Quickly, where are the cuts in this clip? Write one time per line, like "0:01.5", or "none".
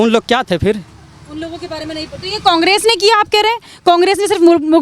none